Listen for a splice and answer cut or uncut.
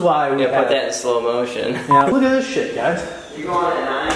cut